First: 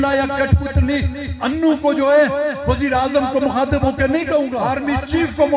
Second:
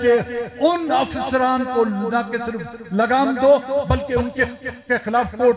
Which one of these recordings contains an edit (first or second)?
first